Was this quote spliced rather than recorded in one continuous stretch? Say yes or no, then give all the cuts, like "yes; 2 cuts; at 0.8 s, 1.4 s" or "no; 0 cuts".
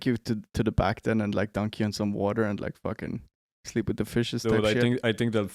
no; 0 cuts